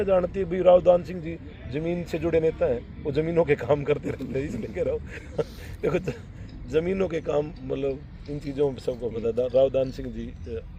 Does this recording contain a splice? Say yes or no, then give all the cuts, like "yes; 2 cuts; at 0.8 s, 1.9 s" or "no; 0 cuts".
no; 0 cuts